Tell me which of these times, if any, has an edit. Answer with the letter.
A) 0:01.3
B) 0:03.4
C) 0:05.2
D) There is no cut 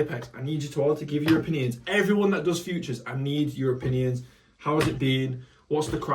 D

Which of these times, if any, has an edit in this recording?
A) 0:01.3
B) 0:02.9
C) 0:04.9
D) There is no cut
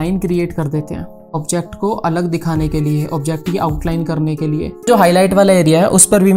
C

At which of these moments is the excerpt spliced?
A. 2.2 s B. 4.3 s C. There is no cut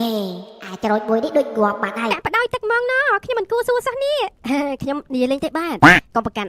A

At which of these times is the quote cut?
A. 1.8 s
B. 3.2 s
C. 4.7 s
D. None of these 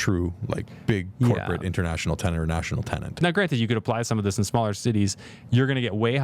B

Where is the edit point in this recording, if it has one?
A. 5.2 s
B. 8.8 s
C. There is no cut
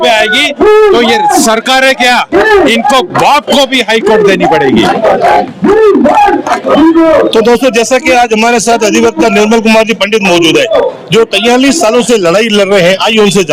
C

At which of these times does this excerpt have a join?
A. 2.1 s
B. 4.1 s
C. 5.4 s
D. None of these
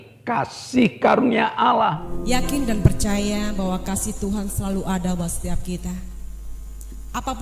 A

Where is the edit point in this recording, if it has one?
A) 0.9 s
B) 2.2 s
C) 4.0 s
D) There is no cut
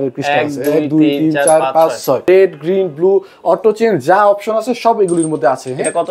B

